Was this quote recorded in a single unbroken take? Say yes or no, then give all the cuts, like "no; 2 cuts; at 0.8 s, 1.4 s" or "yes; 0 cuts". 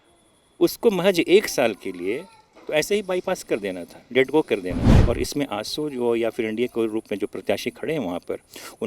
no; 1 cut; at 4.9 s